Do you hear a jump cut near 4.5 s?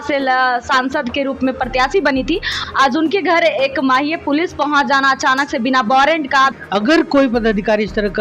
no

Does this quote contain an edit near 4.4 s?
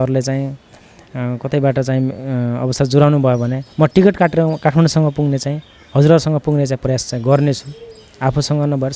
no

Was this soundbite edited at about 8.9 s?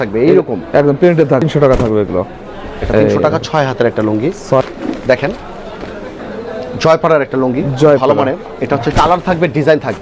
yes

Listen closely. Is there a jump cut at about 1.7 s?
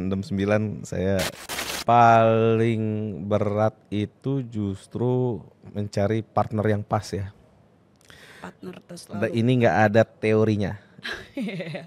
yes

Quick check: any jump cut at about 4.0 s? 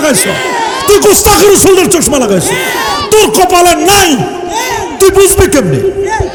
no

